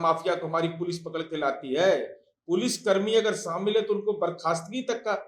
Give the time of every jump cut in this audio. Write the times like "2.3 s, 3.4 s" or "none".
none